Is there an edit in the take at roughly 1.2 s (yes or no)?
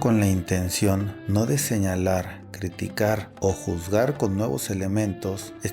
yes